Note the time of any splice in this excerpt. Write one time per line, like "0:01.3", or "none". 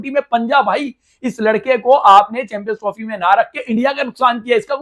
none